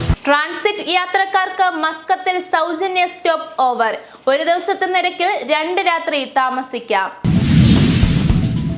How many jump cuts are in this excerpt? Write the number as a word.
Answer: one